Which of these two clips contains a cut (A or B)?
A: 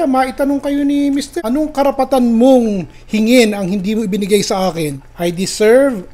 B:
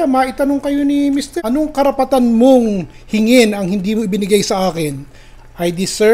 A